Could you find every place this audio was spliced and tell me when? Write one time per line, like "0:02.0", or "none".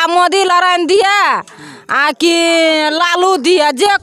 none